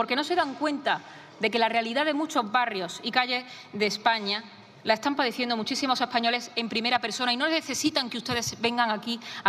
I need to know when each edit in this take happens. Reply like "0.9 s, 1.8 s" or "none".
none